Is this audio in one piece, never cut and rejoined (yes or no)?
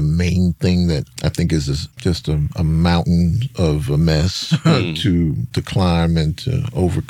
no